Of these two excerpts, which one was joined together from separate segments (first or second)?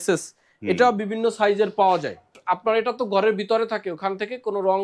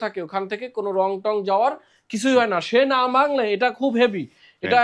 first